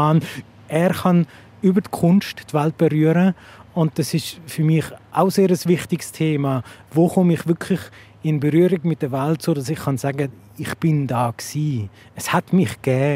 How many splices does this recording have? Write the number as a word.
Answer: one